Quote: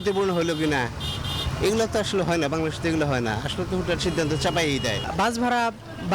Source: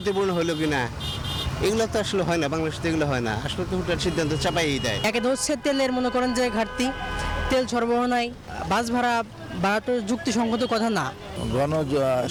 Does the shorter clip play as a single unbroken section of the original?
no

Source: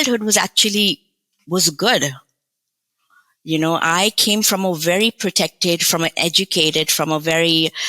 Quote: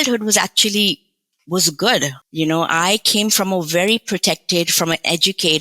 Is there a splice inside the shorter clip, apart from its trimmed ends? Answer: yes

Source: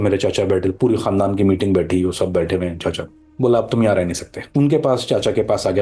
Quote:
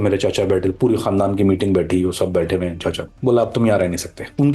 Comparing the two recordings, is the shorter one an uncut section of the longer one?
no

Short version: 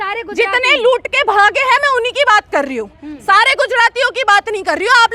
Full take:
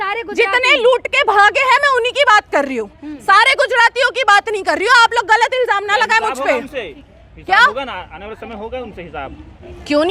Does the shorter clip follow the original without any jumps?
yes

